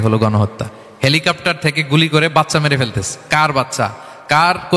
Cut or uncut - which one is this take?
uncut